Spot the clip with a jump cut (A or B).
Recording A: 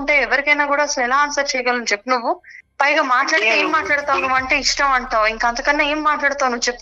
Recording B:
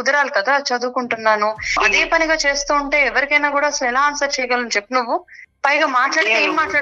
B